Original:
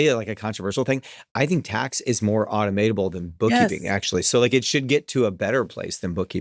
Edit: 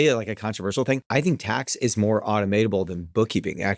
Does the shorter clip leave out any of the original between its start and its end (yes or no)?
yes